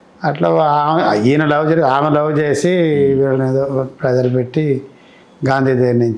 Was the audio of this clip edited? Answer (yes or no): no